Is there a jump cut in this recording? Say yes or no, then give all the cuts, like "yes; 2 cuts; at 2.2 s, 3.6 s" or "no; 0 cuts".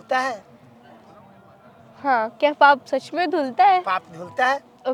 no; 0 cuts